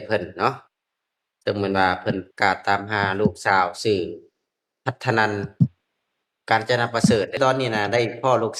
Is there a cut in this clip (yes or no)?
yes